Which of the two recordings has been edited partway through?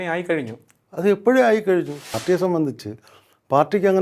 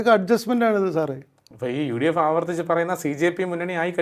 first; 1 cut; at 2.1 s

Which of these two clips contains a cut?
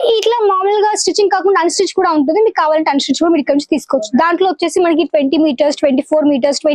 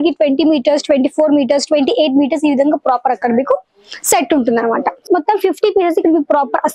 second; 1 cut; at 5.1 s

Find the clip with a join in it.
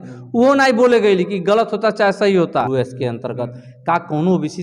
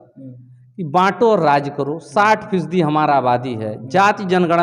first; 1 cut; at 2.7 s

